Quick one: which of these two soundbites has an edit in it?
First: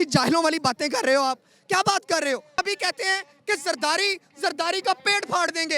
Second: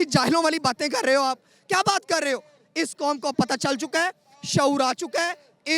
first; 1 cut; at 2.5 s

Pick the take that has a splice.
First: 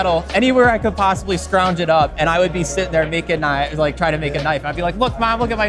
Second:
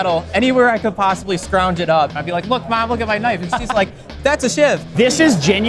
second; 2 cuts; at 2.1 s, 4.9 s

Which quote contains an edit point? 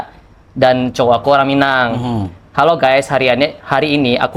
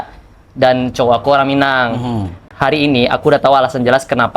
second; 1 cut; at 2.5 s

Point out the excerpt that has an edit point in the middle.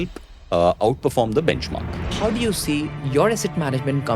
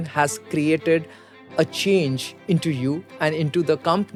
first; 1 cut; at 2.1 s

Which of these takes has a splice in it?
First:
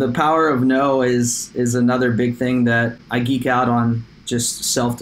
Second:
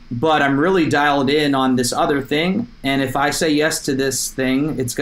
first; 1 cut; at 3.0 s

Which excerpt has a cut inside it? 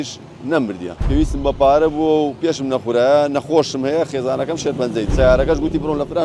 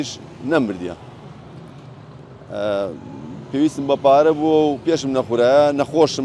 first; 2 cuts; at 0.9 s, 5.1 s

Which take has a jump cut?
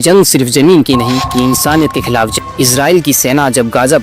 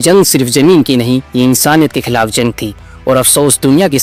first; 1 cut; at 2.3 s

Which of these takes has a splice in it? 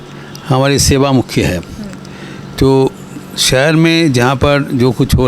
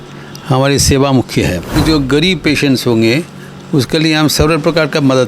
second; 1 cut; at 1.8 s

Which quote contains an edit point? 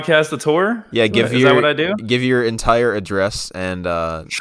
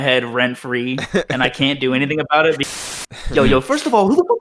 second; 1 cut; at 2.6 s

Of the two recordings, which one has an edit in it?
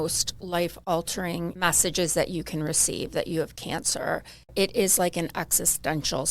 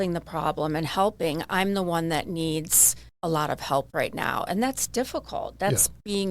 first; 2 cuts; at 1.5 s, 4.5 s

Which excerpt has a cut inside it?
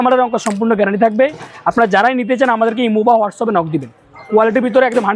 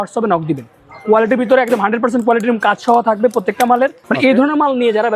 second; 1 cut; at 4.0 s

